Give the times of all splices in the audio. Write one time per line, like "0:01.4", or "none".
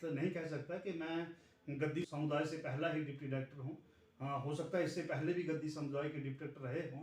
0:02.1